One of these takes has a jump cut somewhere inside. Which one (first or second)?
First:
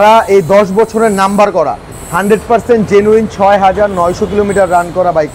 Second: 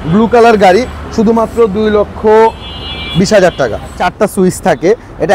second